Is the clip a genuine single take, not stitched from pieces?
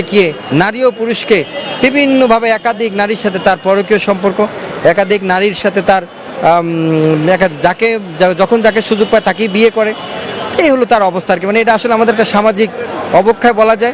yes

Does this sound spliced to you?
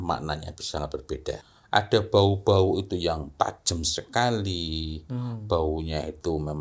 yes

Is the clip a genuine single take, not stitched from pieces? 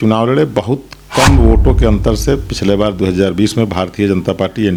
yes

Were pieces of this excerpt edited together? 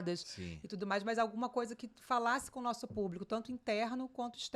no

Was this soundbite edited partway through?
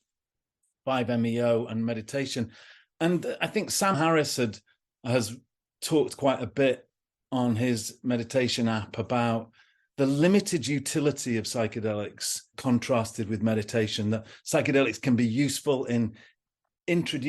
yes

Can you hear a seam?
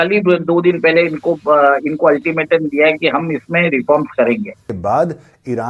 yes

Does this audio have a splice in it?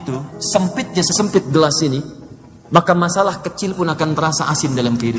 no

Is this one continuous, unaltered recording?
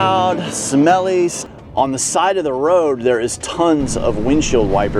no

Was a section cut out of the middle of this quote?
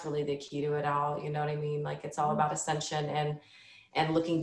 no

